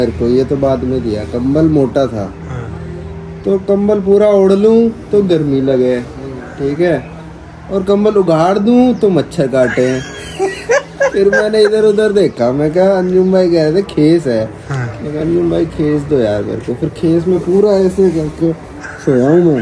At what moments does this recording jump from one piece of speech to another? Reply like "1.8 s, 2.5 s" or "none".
none

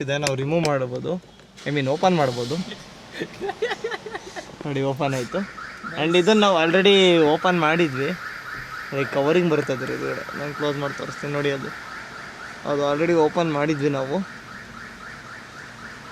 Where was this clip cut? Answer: none

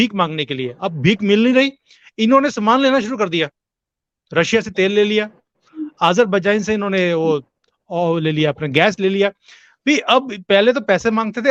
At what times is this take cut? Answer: none

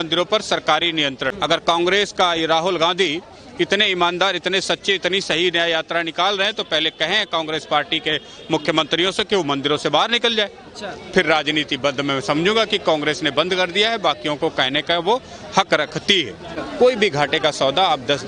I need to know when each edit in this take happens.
1.3 s, 16.5 s

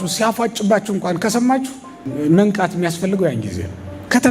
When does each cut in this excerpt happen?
2.1 s

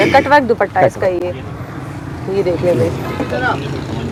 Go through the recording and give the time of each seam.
none

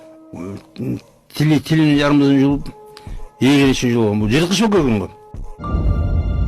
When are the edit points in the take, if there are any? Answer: 5.5 s

